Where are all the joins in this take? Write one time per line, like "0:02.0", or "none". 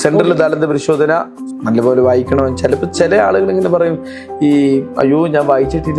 0:01.4